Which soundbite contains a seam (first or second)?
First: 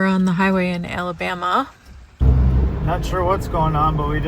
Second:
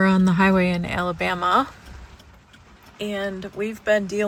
first